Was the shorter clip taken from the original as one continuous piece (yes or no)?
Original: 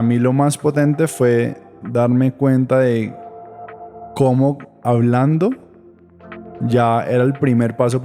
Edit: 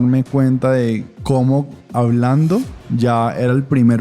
no